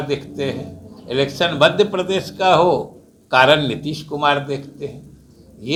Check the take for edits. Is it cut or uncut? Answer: uncut